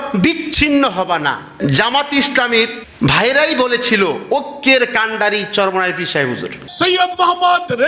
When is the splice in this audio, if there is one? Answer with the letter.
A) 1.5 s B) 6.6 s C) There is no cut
A